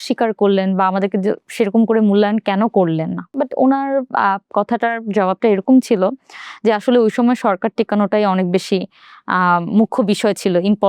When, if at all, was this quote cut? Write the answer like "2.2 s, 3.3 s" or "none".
3.3 s